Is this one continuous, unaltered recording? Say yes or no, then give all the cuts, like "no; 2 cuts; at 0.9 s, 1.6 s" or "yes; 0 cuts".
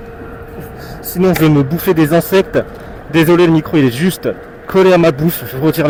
yes; 0 cuts